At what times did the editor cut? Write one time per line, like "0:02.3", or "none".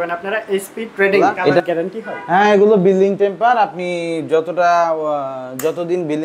0:01.6